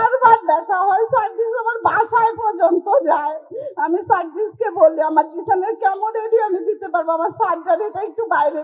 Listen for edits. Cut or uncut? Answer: uncut